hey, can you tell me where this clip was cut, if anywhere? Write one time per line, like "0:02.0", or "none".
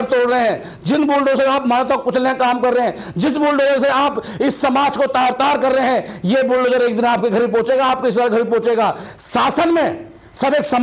none